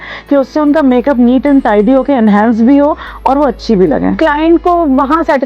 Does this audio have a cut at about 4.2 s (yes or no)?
yes